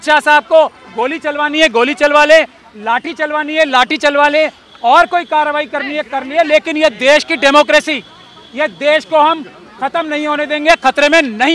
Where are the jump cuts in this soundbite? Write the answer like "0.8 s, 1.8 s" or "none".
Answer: none